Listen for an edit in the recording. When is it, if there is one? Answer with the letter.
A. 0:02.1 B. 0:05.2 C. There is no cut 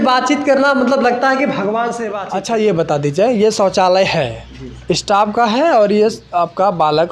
A